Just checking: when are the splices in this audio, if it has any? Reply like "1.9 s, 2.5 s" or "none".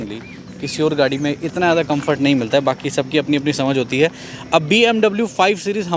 none